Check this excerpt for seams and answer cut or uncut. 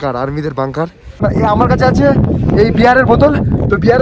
cut